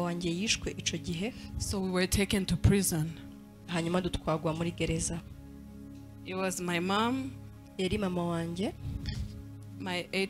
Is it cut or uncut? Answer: uncut